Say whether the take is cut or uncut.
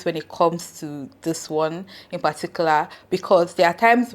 uncut